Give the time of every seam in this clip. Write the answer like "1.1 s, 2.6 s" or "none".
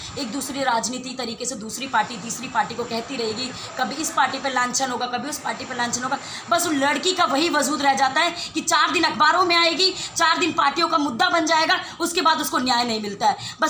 none